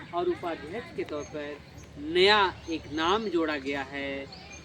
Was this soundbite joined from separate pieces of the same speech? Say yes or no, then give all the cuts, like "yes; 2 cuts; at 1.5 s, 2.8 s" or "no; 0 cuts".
no; 0 cuts